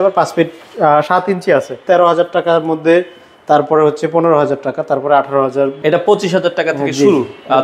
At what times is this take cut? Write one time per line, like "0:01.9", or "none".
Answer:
0:01.8
0:05.8

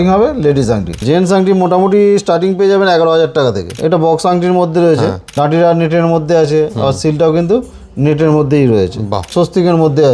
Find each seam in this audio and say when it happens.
0:01.0
0:03.7
0:05.2
0:09.2

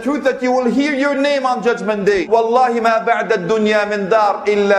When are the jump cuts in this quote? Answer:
0:02.2

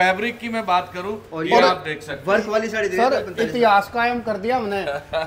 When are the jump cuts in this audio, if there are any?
none

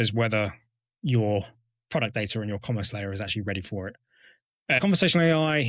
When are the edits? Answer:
0:04.8

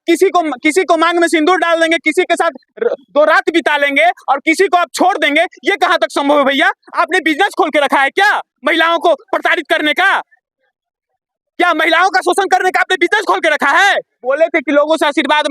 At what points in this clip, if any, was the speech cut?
0:14.2

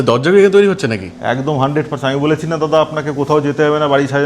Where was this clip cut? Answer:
none

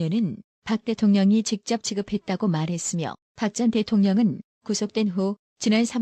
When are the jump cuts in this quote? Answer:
0:01.0

